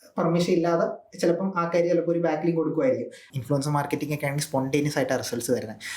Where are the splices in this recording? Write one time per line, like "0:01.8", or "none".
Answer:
0:03.2